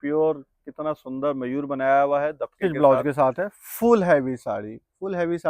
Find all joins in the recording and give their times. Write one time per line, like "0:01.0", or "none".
0:02.6

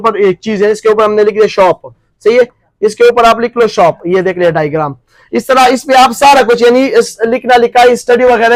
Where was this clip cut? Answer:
none

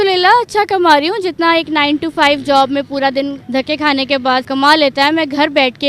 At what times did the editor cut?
0:03.4
0:04.5

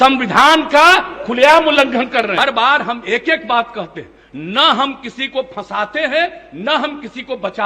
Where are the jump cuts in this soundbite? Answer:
0:02.3

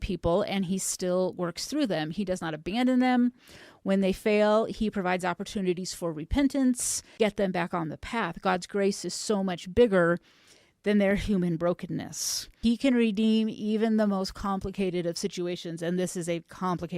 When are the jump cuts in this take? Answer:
0:07.0
0:12.5

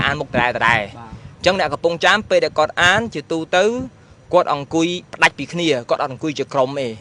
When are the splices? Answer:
none

